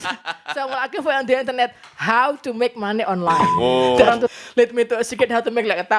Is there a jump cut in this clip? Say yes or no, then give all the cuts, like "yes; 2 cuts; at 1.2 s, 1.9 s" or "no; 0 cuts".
yes; 1 cut; at 4.3 s